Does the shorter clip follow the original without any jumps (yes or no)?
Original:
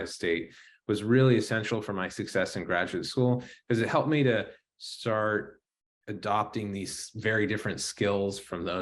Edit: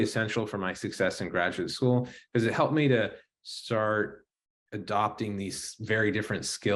yes